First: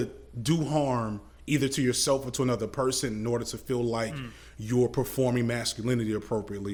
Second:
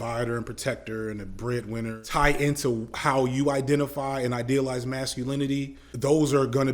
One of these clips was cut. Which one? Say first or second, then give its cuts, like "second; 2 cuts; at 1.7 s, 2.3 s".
second; 2 cuts; at 2.0 s, 5.8 s